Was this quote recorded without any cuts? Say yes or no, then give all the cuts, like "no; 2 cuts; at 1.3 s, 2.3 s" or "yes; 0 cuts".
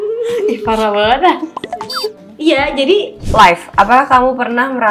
no; 2 cuts; at 2.2 s, 3.2 s